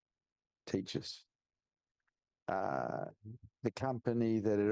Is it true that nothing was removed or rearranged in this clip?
yes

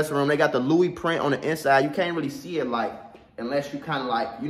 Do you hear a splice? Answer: no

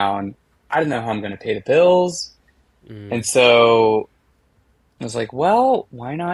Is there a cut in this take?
no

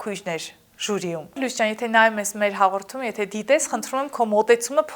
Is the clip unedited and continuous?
no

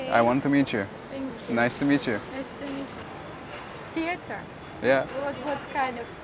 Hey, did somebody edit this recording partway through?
yes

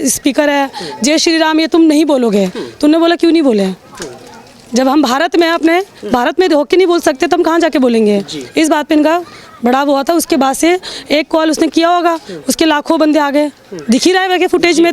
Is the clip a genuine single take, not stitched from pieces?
yes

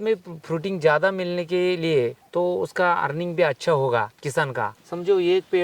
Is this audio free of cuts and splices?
no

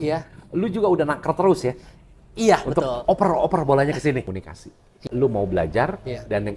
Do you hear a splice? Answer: yes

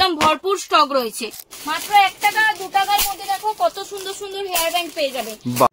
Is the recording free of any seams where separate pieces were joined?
no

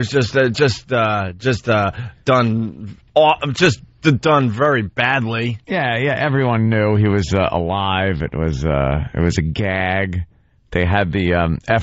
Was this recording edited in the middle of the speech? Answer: no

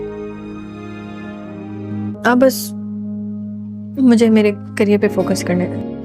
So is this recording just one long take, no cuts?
yes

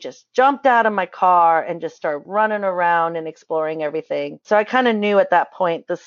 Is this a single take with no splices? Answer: no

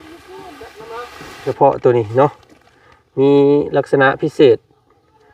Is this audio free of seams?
no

